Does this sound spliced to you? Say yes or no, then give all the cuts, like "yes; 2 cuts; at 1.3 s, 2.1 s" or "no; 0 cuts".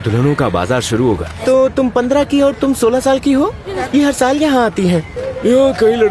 yes; 3 cuts; at 1.3 s, 3.7 s, 5.2 s